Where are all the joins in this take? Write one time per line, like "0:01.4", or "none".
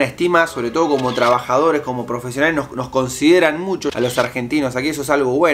0:03.9

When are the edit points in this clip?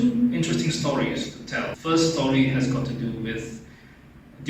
0:01.7

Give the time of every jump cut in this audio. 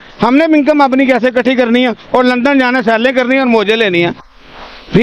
none

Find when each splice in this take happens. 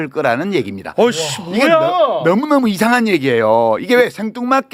none

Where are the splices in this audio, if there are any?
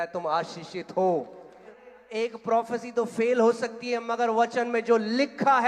0:01.7

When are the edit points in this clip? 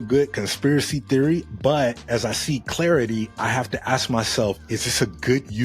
0:02.0

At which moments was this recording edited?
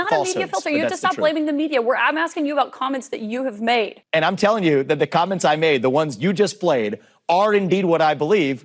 0:04.0

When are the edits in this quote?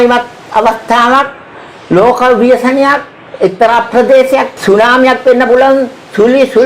0:04.5

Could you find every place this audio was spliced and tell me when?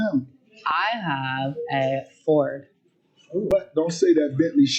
0:03.5

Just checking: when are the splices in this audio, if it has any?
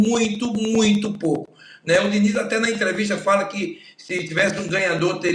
none

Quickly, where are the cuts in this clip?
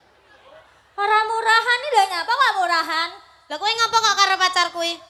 none

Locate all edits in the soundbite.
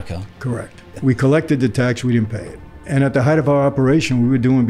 0:00.9
0:02.8

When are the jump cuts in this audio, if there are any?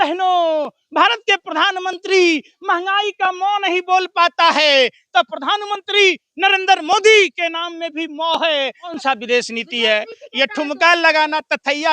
0:08.9

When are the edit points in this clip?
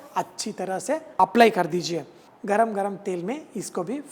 0:01.2
0:02.3

